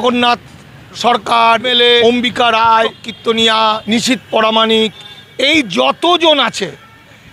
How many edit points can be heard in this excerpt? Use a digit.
3